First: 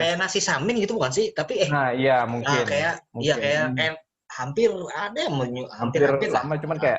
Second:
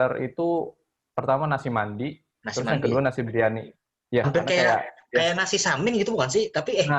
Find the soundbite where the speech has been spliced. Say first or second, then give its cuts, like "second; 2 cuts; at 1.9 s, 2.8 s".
second; 1 cut; at 4.3 s